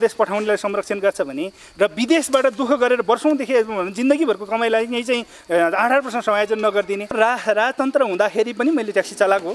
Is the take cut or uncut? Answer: cut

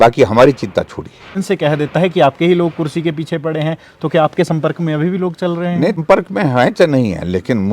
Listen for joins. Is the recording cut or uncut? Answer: cut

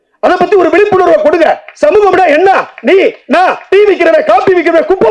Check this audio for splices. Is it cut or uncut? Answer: uncut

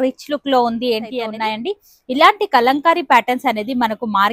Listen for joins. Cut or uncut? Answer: cut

